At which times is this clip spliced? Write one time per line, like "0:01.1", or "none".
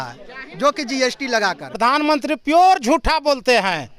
0:01.8